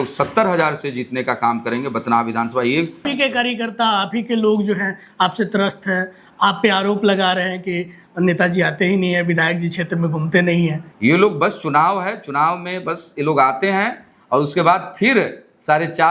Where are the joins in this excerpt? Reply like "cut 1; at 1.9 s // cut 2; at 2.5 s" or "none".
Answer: cut 1; at 3.1 s // cut 2; at 10.9 s